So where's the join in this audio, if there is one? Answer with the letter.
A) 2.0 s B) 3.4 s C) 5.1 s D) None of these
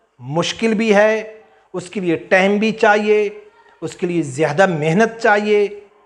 D